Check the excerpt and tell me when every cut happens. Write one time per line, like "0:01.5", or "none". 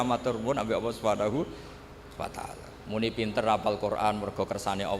0:02.7